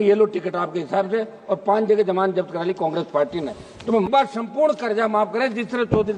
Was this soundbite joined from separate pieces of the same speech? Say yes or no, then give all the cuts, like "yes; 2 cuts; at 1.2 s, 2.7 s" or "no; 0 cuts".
yes; 1 cut; at 4.1 s